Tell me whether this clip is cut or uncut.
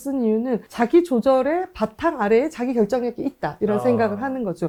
uncut